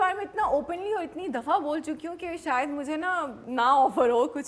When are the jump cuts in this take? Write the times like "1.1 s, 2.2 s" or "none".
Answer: 3.4 s